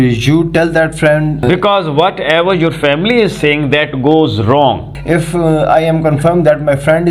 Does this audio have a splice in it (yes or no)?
yes